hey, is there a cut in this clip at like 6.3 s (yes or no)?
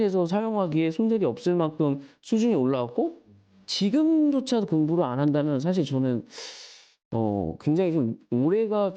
no